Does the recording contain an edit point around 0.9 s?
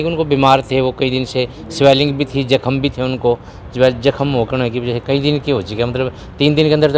no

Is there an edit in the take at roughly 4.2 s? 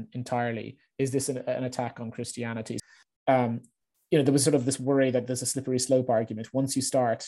no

